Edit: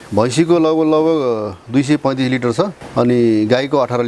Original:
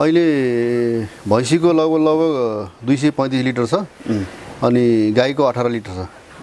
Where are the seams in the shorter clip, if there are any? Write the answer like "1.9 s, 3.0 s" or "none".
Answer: 2.8 s